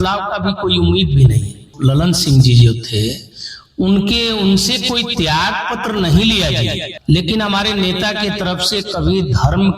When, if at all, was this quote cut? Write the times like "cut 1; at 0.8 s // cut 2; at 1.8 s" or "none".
cut 1; at 1.6 s // cut 2; at 6.9 s